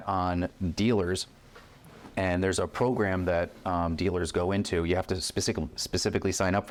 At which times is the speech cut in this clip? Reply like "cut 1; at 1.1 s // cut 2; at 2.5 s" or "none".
none

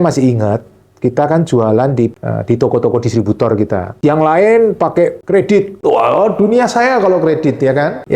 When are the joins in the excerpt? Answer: cut 1; at 2.3 s

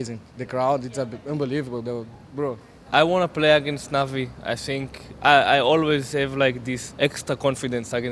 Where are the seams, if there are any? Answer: cut 1; at 2.8 s // cut 2; at 6.8 s

